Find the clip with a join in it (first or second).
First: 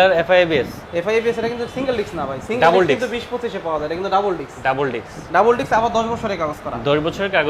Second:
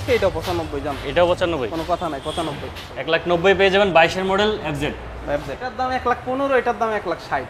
second